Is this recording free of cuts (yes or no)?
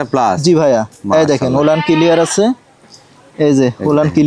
yes